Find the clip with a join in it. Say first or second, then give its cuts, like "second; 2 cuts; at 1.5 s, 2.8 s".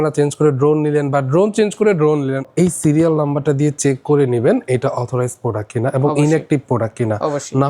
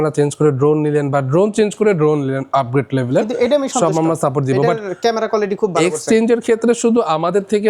first; 1 cut; at 2.5 s